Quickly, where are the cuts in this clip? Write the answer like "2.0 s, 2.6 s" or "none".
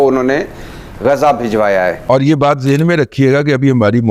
2.0 s